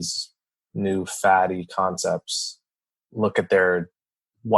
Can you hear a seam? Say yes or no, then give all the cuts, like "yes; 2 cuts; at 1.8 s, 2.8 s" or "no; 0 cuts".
yes; 1 cut; at 2.8 s